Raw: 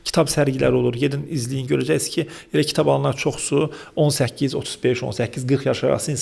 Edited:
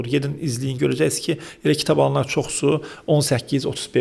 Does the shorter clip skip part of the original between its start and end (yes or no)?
no